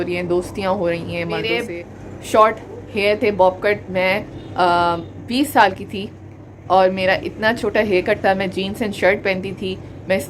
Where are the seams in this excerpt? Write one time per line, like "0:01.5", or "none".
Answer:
0:01.6